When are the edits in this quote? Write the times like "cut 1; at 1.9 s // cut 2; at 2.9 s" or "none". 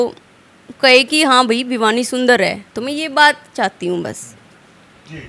none